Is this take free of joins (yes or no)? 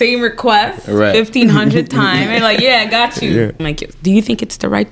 no